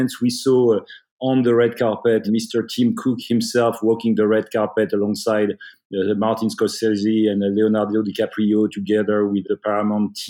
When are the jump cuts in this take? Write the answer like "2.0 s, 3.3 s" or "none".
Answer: 2.2 s